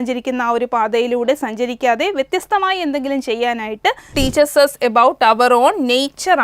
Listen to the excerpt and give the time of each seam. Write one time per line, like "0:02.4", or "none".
0:04.1